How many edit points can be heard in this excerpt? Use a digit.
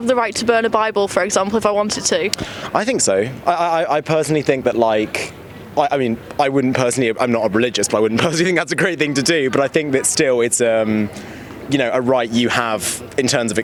0